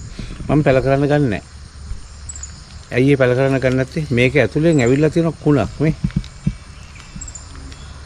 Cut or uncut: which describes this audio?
uncut